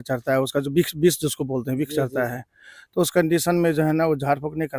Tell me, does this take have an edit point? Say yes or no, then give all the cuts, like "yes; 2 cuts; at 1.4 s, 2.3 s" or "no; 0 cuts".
no; 0 cuts